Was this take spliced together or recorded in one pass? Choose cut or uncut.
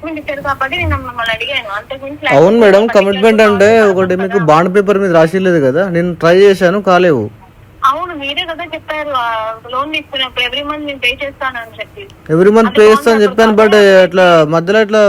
uncut